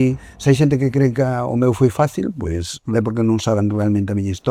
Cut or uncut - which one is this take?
uncut